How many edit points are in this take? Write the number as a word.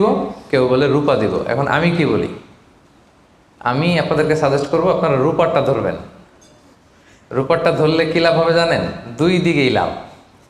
zero